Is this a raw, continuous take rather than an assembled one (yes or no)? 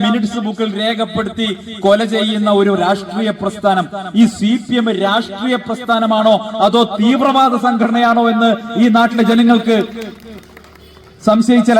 yes